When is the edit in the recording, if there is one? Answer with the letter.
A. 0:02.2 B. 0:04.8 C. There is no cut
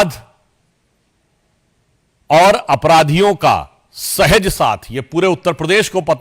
C